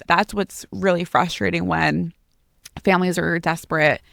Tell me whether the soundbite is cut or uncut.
uncut